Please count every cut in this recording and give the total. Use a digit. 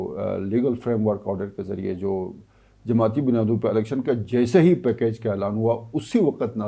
0